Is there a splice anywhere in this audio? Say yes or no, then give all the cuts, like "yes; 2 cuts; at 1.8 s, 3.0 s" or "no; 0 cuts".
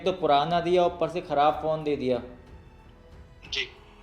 no; 0 cuts